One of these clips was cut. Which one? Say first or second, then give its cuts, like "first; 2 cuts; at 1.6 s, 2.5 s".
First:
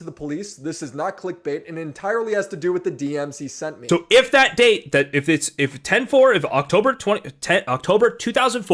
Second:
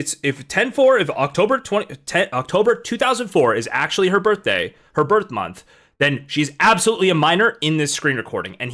first; 1 cut; at 3.8 s